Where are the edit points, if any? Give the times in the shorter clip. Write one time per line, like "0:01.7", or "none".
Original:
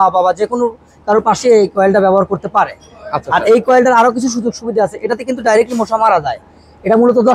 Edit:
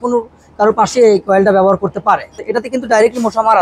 0:02.4